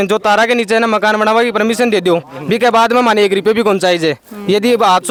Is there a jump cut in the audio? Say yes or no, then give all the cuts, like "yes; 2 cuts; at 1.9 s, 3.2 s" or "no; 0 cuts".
no; 0 cuts